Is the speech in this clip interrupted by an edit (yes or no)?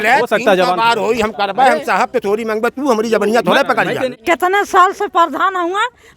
yes